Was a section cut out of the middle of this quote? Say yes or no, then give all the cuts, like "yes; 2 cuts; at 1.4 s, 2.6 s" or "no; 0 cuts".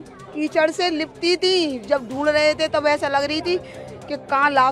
no; 0 cuts